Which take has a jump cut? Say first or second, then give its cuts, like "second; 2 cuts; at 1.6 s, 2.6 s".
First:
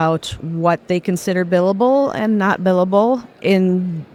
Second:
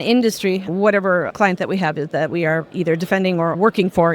second; 2 cuts; at 1.3 s, 2.7 s